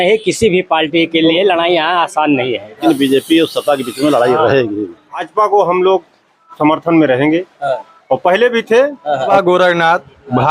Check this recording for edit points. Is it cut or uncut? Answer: cut